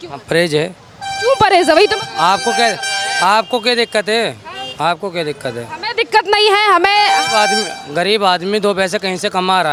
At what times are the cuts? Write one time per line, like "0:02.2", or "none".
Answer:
none